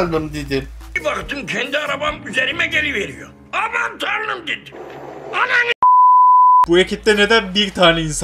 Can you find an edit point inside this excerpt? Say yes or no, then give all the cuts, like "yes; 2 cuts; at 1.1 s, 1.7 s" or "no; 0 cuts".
yes; 1 cut; at 6.7 s